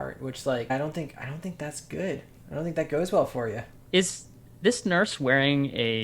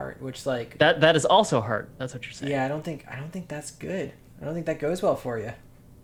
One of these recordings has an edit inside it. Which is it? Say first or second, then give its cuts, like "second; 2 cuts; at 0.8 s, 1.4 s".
first; 2 cuts; at 0.7 s, 3.7 s